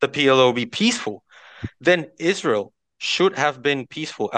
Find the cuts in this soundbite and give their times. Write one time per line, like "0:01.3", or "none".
none